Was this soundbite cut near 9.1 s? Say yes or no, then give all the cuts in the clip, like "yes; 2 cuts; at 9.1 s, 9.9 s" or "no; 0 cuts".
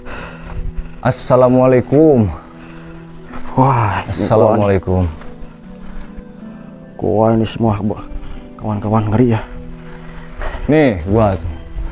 no; 0 cuts